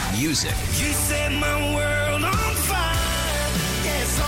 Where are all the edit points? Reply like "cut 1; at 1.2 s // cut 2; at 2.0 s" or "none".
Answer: none